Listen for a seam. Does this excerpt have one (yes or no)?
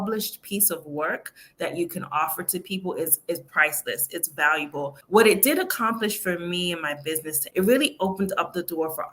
yes